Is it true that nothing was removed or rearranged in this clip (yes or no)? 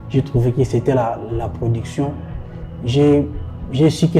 yes